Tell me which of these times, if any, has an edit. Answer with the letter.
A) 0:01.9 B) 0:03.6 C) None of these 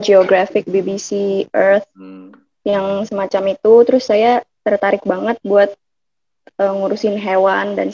C